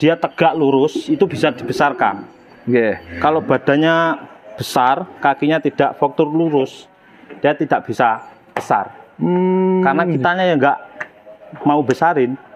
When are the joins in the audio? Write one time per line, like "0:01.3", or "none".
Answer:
none